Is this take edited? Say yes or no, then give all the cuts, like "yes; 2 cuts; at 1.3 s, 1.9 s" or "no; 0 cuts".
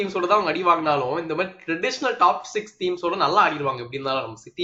no; 0 cuts